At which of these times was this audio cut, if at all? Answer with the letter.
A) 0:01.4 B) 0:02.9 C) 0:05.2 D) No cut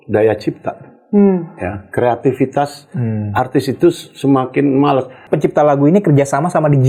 C